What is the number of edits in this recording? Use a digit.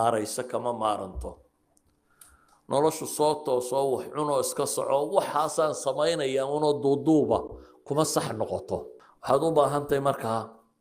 0